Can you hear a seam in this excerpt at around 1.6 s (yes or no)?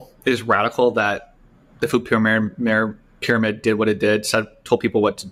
no